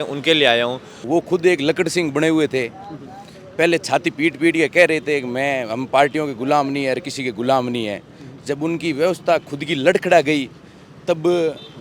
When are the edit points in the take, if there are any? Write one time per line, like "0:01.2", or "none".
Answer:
0:00.9